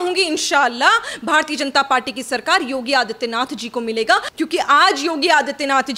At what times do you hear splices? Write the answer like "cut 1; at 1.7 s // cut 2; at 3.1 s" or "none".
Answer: cut 1; at 4.3 s